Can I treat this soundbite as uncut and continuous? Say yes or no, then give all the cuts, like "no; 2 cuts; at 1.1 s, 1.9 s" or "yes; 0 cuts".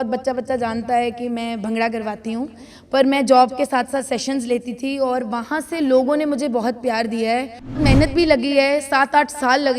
no; 1 cut; at 7.8 s